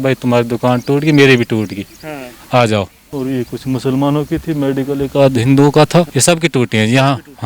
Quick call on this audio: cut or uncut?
cut